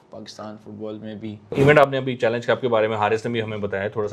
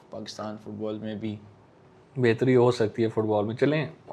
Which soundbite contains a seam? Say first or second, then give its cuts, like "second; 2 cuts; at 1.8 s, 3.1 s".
first; 1 cut; at 1.5 s